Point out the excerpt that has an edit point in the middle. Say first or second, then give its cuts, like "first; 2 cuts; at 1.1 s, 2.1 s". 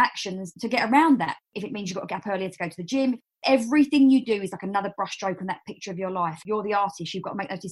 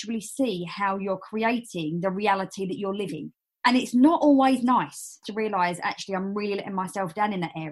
first; 1 cut; at 3.3 s